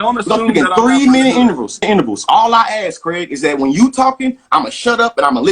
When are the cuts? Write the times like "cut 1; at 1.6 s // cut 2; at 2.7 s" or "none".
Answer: cut 1; at 1.9 s